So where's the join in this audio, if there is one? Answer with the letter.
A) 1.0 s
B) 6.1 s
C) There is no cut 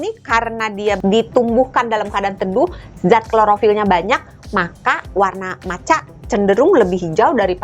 A